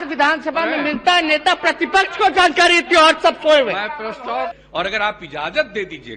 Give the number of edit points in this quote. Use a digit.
1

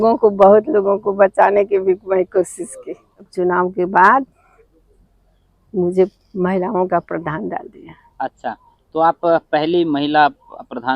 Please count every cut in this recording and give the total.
1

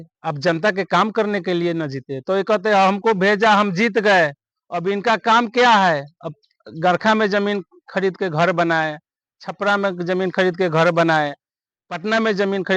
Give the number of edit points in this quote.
0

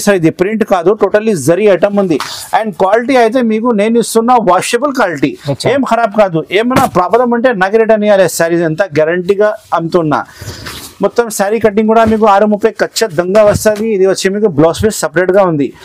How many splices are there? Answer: 0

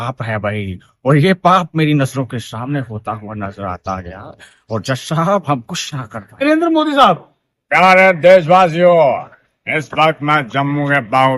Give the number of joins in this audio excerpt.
1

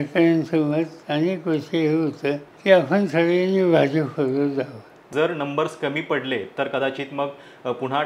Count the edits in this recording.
2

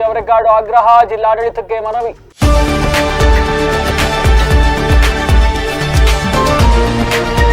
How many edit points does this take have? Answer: 1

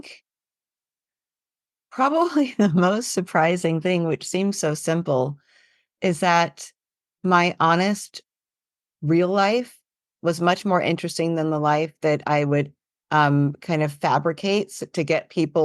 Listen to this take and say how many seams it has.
0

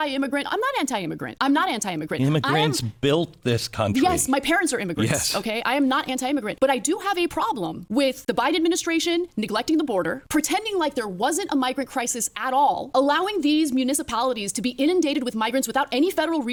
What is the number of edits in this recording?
0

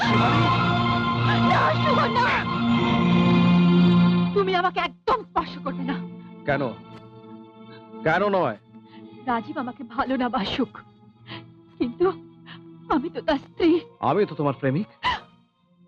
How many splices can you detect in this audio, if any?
0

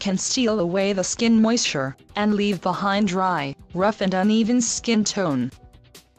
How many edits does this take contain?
1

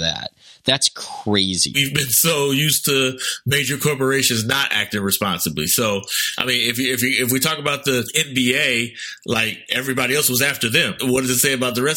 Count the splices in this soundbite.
3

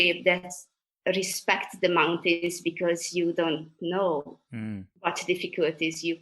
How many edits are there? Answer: 1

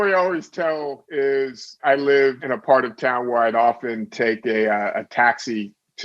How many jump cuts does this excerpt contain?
3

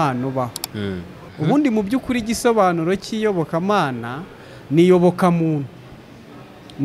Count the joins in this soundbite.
1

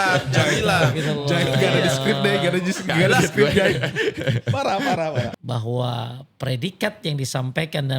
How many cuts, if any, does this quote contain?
1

